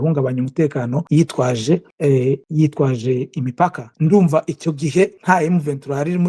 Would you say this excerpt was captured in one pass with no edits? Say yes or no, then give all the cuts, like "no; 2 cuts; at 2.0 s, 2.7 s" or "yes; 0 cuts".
no; 4 cuts; at 1.0 s, 2.2 s, 3.9 s, 5.2 s